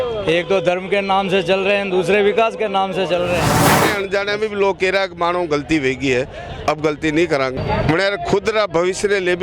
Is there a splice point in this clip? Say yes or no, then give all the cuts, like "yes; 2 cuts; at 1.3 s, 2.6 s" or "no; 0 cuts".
yes; 2 cuts; at 3.6 s, 7.5 s